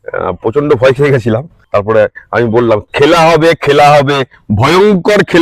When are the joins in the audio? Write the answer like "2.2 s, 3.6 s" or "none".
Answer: 1.5 s

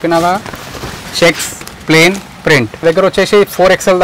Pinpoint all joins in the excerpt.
2.8 s

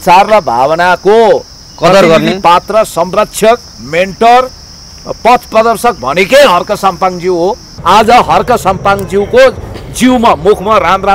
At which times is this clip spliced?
7.7 s

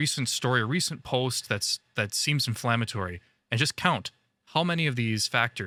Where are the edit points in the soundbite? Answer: none

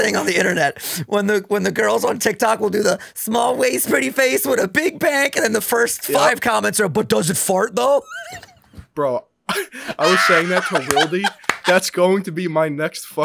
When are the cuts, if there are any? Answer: none

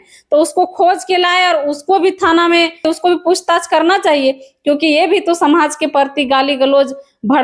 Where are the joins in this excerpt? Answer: 2.9 s

